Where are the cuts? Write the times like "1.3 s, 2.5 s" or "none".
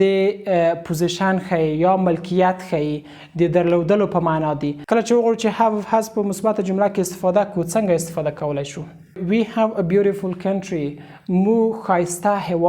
4.7 s, 9.2 s